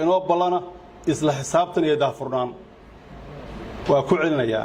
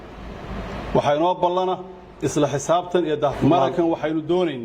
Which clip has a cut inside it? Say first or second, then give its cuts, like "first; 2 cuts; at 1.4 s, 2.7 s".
second; 1 cut; at 3.4 s